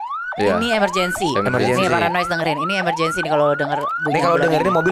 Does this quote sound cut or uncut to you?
uncut